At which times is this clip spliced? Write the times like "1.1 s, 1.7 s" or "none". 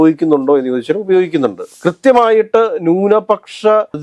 1.6 s